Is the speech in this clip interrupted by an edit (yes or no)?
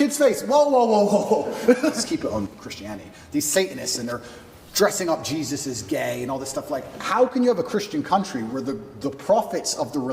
yes